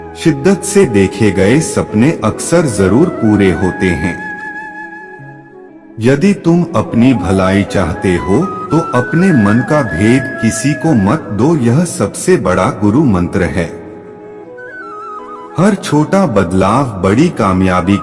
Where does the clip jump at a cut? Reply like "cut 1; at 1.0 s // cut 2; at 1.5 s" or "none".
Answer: none